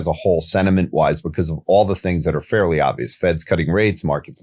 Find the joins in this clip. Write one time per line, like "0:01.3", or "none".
none

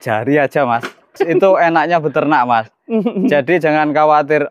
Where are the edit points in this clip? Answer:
0:01.0

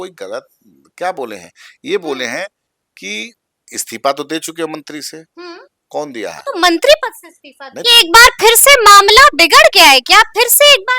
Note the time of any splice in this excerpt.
0:07.8

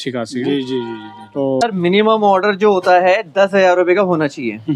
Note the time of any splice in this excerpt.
0:01.6

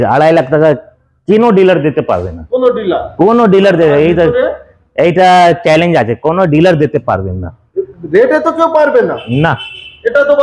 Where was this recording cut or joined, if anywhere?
none

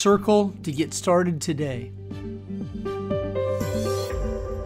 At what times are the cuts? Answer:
0:01.9

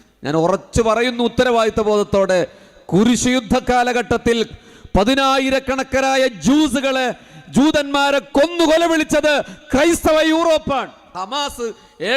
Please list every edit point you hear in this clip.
0:11.2

